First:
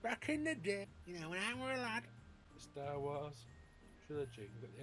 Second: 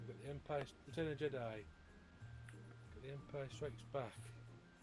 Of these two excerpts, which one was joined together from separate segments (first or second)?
first